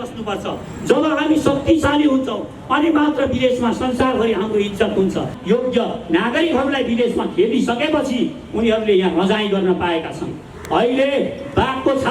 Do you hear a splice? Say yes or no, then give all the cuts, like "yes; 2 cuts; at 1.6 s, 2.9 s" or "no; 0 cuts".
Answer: yes; 1 cut; at 5.3 s